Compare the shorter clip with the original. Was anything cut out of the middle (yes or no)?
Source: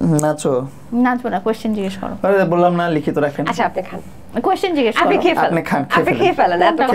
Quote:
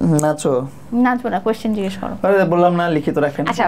no